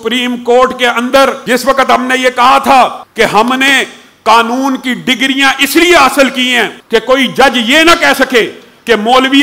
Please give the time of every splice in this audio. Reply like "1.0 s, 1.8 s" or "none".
1.4 s, 3.0 s, 6.7 s